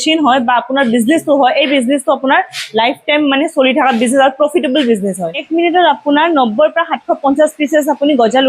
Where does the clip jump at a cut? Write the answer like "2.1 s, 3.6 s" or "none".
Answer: 5.4 s